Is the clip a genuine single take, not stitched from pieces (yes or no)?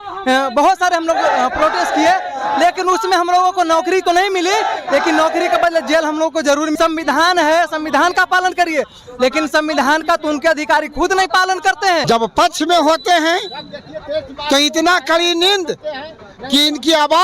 no